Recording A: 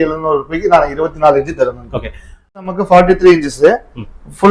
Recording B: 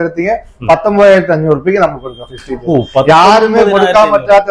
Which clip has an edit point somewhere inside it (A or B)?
A